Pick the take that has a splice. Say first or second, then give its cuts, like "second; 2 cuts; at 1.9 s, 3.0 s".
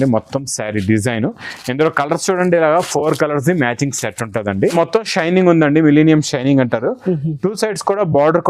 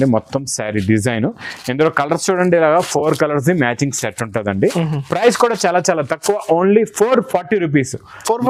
first; 1 cut; at 4.7 s